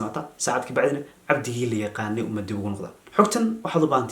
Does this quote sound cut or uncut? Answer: cut